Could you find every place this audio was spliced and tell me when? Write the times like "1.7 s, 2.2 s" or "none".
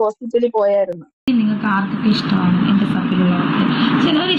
1.4 s